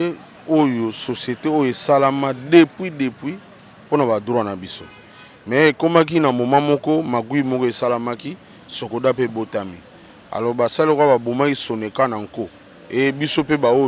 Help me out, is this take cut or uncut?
uncut